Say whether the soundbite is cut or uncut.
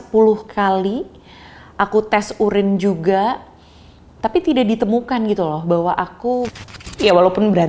cut